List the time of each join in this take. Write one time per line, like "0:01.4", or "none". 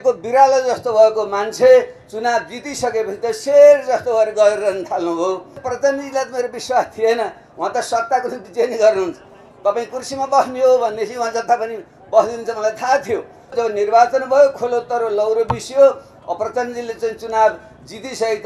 0:05.6
0:13.6